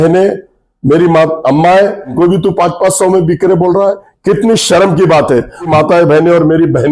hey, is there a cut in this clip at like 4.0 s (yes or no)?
no